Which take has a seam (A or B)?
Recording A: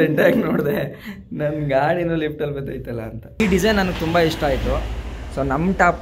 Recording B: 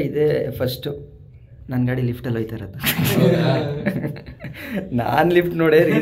A